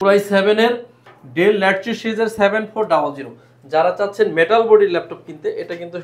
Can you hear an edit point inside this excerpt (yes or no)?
no